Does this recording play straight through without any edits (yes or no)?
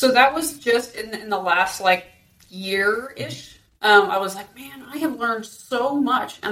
yes